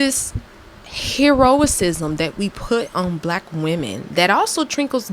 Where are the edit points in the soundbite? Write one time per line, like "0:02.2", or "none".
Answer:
none